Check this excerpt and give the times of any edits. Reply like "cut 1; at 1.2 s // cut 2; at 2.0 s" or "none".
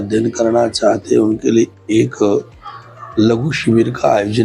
none